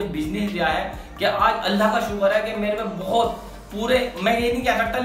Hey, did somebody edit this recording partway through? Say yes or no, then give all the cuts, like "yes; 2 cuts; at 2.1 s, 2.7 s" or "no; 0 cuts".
no; 0 cuts